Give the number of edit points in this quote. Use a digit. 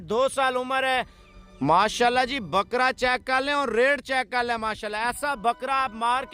1